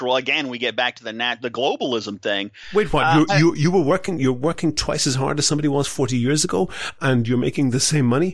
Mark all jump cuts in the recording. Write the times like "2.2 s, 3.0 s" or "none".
none